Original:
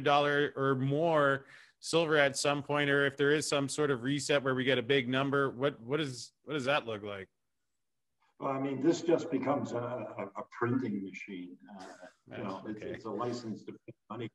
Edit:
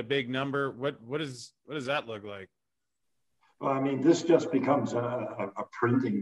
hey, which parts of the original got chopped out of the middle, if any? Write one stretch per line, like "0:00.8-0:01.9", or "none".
none